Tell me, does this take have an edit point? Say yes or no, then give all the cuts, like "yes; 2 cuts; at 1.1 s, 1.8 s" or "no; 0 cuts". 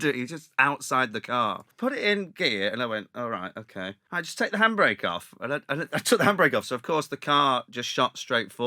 yes; 2 cuts; at 1.7 s, 4.0 s